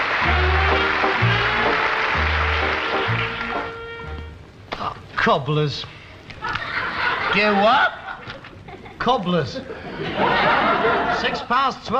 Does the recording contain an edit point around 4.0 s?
no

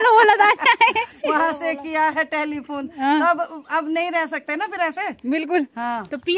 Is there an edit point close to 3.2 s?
no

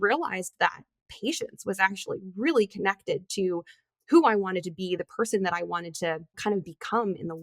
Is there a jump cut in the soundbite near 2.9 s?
no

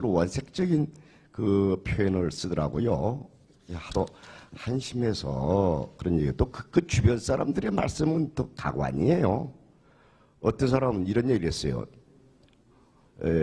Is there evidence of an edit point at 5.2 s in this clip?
yes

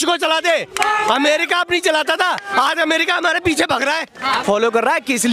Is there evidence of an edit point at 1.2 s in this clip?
no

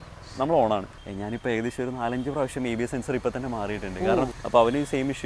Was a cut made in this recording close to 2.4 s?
no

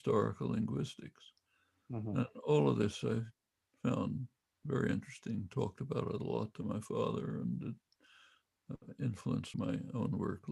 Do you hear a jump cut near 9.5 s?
yes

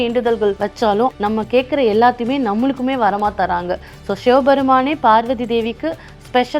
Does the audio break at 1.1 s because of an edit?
yes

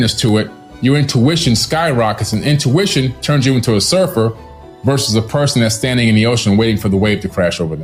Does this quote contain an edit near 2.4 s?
no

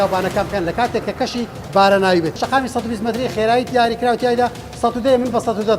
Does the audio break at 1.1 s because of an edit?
no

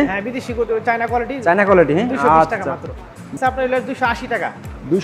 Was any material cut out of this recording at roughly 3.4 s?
yes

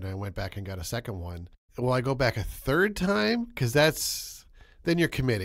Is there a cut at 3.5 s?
no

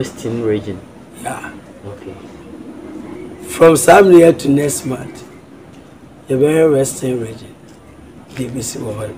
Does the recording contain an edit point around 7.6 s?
no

